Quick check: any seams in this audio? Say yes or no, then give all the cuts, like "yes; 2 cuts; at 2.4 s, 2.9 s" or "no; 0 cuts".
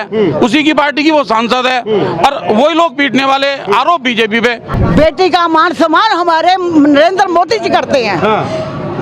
yes; 1 cut; at 4.6 s